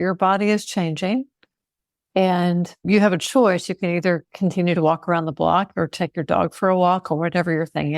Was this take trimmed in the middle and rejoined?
yes; 1 cut; at 2.8 s

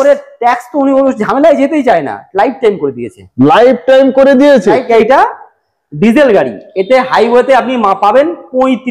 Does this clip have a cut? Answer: yes; 1 cut; at 4.9 s

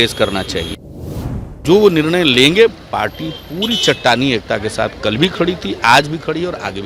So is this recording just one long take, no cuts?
no; 1 cut; at 1.3 s

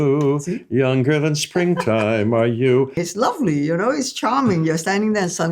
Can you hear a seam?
yes; 1 cut; at 2.9 s

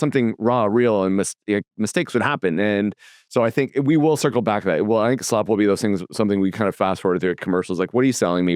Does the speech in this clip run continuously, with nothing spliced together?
yes; 0 cuts

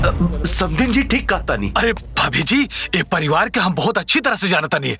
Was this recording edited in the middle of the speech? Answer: no; 0 cuts

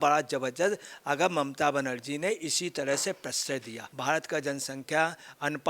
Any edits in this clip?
yes; 1 cut; at 3.9 s

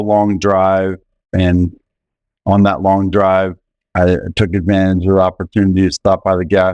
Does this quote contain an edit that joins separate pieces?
yes; 1 cut; at 1.2 s

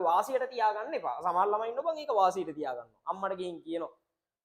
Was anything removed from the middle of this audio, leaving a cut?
no; 0 cuts

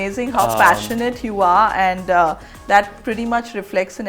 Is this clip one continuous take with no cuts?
yes; 0 cuts

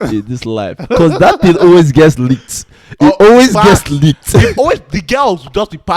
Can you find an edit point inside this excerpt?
no; 0 cuts

